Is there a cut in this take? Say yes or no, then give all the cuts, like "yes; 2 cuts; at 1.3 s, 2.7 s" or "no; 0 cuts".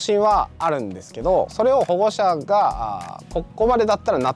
yes; 1 cut; at 1.5 s